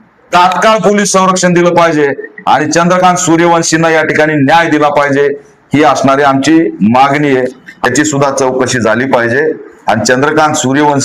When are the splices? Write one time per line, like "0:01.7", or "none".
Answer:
0:07.9